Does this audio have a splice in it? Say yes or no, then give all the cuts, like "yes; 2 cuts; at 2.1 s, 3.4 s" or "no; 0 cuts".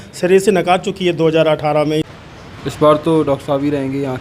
yes; 1 cut; at 2.1 s